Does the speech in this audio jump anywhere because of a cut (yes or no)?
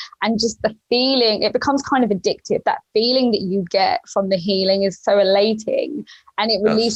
no